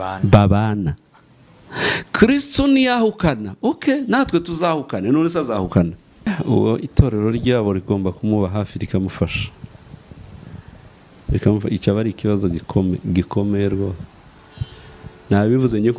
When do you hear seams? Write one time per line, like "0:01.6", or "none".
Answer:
0:06.3